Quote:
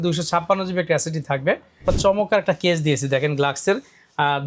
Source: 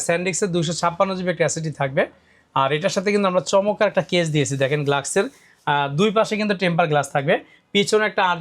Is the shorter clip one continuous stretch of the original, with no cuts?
no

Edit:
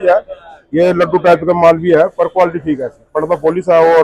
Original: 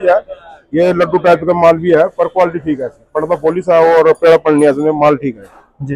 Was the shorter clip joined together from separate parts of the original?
no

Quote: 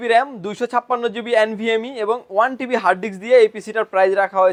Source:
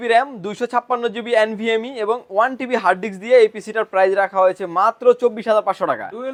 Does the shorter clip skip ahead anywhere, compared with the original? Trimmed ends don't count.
no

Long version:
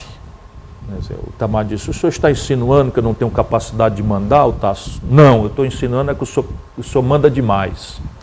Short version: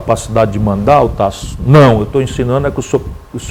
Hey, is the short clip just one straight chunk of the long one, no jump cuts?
yes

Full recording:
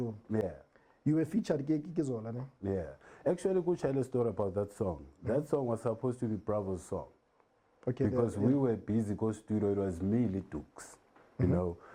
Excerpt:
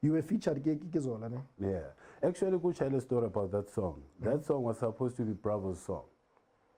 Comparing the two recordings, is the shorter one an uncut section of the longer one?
yes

